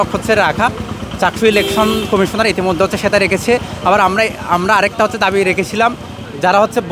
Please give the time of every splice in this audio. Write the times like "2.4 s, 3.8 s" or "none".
none